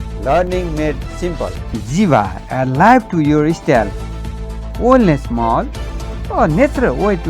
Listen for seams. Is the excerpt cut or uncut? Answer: cut